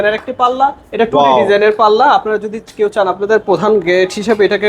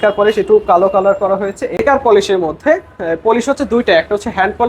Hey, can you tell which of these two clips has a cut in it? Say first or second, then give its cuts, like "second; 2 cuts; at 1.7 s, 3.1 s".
second; 1 cut; at 1.8 s